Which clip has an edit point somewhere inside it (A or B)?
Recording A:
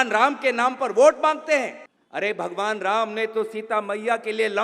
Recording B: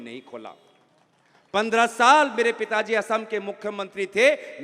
A